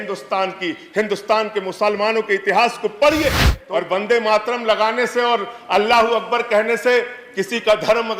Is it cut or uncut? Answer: cut